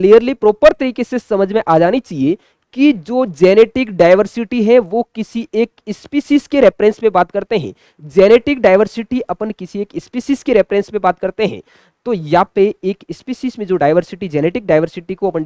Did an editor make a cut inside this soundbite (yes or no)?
no